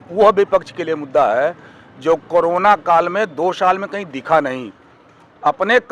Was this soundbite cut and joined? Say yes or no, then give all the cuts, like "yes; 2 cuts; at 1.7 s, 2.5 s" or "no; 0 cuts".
no; 0 cuts